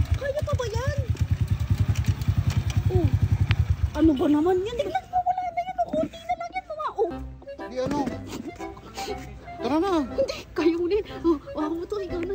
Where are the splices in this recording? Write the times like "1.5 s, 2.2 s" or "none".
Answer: 3.8 s, 4.7 s